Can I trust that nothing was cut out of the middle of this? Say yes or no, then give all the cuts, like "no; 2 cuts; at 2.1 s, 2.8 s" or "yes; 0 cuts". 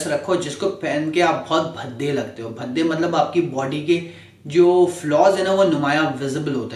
yes; 0 cuts